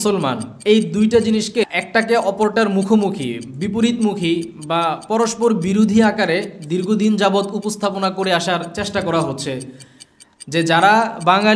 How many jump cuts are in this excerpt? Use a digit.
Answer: 1